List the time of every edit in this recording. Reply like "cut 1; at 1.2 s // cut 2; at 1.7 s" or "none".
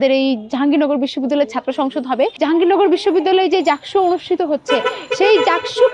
cut 1; at 2.4 s